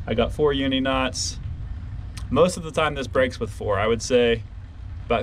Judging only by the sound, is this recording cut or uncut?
uncut